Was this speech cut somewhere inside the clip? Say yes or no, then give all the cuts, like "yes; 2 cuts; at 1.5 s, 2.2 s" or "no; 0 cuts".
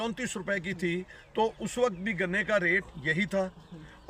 no; 0 cuts